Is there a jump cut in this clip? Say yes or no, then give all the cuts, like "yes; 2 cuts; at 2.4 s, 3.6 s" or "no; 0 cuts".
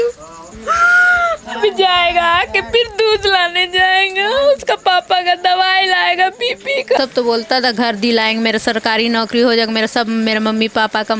yes; 1 cut; at 7.0 s